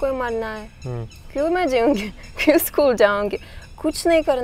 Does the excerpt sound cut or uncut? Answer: uncut